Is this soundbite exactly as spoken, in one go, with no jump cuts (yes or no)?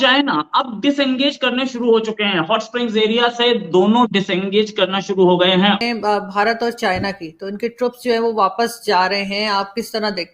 no